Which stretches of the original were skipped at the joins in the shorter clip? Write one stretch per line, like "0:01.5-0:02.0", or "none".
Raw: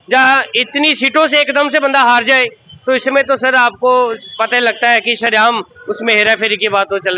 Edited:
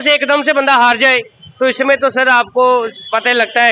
none